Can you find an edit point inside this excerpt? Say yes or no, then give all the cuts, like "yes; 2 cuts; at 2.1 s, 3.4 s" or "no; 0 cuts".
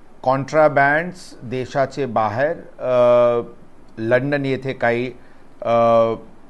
no; 0 cuts